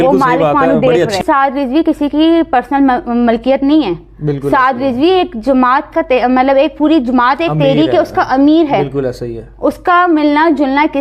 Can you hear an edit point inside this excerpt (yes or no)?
yes